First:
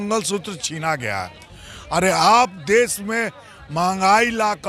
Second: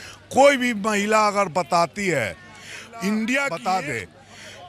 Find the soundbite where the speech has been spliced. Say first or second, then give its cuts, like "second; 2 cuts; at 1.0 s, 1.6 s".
second; 1 cut; at 3.5 s